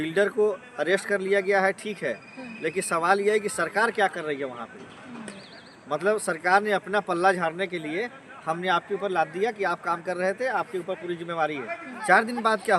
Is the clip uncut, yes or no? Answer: no